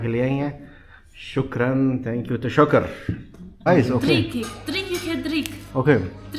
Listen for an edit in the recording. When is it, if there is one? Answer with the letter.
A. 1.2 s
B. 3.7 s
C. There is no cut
B